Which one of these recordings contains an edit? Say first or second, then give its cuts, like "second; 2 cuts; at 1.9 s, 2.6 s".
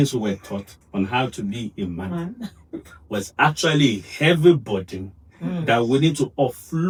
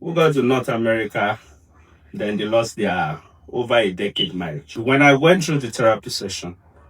second; 1 cut; at 4.8 s